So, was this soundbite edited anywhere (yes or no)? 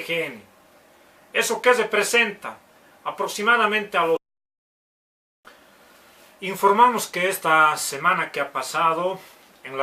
no